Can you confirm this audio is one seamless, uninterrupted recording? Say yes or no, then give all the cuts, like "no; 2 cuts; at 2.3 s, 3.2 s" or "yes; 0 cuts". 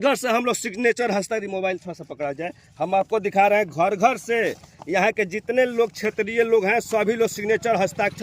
yes; 0 cuts